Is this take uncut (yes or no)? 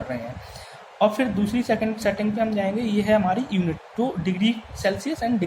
yes